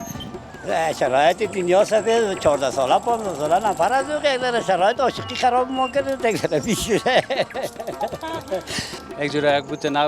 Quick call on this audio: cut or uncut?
cut